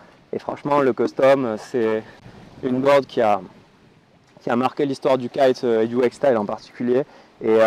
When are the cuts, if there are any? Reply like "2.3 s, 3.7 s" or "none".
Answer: none